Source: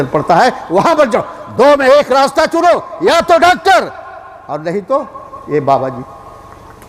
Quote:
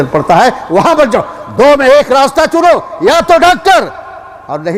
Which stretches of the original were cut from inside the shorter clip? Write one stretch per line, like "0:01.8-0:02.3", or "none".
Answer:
none